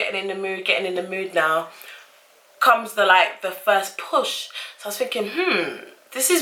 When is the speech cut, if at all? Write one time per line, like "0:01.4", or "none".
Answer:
none